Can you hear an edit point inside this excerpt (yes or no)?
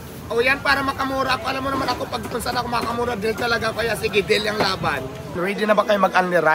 yes